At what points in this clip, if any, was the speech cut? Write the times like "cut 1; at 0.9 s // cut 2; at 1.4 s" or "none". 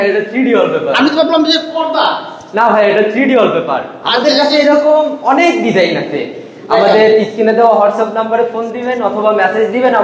none